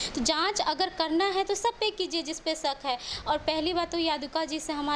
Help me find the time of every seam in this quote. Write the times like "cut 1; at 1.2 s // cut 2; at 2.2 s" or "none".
none